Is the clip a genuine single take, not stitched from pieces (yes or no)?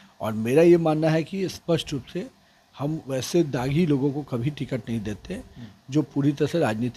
yes